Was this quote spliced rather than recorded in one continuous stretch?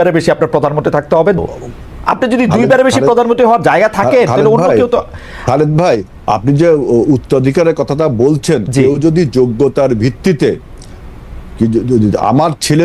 no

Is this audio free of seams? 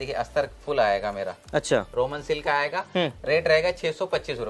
yes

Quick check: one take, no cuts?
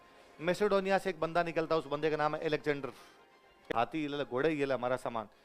no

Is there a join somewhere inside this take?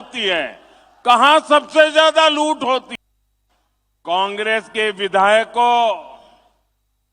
yes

